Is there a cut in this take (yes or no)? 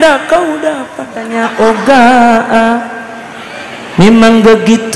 yes